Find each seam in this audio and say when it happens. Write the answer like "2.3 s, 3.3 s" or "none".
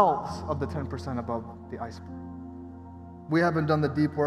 none